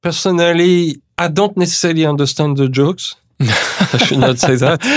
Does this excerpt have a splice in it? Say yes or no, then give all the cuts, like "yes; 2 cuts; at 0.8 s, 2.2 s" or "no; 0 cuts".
yes; 1 cut; at 1.0 s